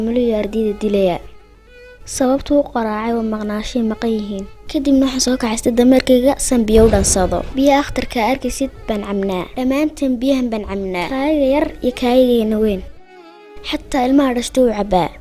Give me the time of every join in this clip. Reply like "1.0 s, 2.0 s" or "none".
none